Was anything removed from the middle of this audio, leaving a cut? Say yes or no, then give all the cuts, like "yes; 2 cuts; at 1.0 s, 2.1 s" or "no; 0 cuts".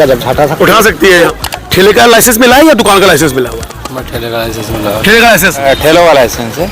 yes; 2 cuts; at 1.3 s, 5.6 s